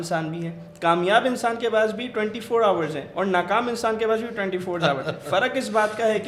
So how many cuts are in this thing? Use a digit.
0